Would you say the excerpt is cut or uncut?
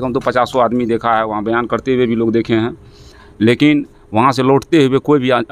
uncut